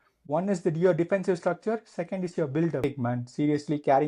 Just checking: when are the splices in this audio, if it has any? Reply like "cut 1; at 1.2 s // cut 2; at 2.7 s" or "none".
cut 1; at 2.8 s